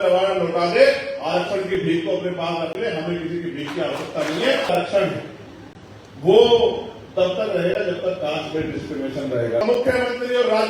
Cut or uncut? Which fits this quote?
cut